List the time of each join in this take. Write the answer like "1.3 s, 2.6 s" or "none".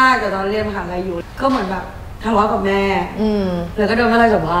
1.2 s